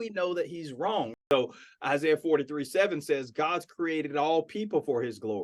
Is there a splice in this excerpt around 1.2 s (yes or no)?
yes